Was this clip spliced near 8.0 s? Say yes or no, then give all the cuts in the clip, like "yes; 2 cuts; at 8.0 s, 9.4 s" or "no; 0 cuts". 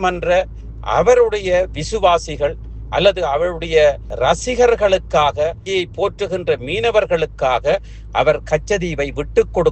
no; 2 cuts; at 4.1 s, 5.6 s